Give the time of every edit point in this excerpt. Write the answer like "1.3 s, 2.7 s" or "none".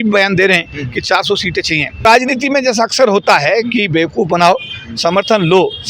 2.0 s